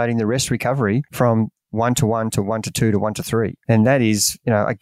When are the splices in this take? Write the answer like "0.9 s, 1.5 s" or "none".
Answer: 1.1 s, 3.6 s